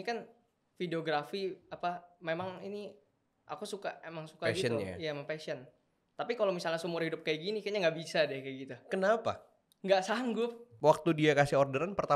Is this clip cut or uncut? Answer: cut